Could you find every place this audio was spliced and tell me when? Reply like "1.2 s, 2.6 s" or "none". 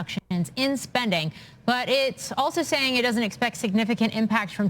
1.3 s